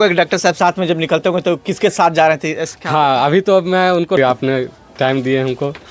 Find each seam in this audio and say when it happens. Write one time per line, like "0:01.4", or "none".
0:04.2